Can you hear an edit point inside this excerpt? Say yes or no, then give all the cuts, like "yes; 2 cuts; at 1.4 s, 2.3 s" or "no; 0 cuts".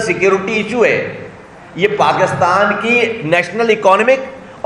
no; 0 cuts